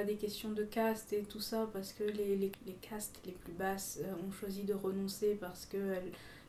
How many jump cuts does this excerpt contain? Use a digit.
1